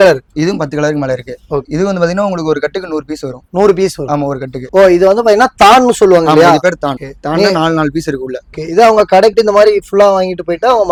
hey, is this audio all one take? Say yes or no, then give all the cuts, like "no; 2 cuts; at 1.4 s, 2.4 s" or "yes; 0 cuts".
yes; 0 cuts